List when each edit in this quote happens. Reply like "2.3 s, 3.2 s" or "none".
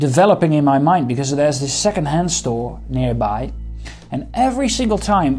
none

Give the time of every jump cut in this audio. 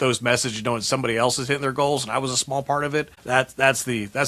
3.2 s

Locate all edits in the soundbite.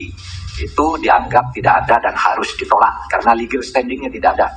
none

